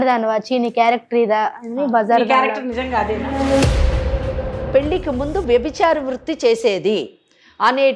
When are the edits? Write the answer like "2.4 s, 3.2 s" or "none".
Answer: 4.7 s